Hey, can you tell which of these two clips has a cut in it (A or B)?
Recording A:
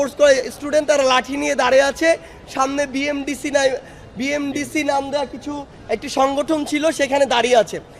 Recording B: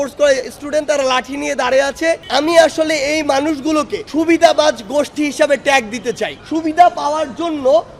B